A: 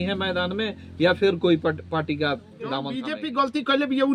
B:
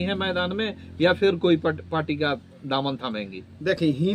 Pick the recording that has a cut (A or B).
A